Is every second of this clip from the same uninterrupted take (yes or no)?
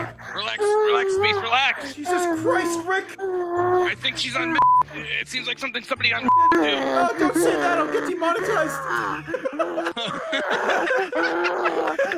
yes